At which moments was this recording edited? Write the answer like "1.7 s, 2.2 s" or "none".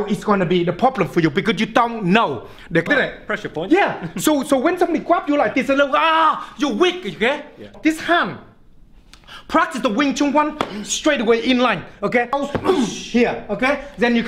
2.9 s, 7.7 s, 12.4 s